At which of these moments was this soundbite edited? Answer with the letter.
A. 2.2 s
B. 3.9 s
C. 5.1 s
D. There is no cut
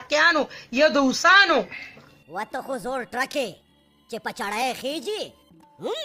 A